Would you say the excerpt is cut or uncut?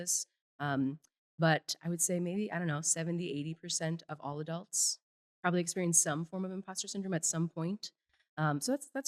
uncut